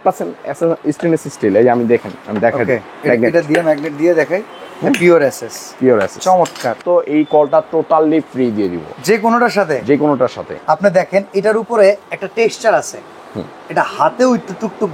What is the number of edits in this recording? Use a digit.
2